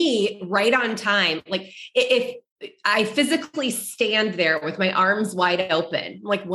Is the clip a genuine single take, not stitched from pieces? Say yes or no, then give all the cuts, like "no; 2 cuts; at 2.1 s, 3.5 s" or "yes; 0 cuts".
yes; 0 cuts